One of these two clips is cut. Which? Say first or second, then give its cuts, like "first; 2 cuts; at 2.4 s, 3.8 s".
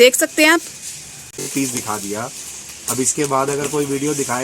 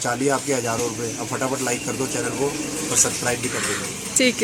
first; 1 cut; at 1.4 s